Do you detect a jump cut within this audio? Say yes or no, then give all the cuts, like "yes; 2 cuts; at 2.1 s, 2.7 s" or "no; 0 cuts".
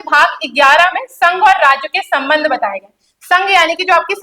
no; 0 cuts